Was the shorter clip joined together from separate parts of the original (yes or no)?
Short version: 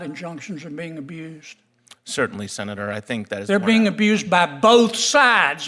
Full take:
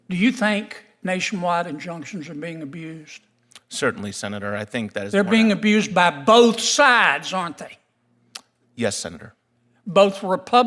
no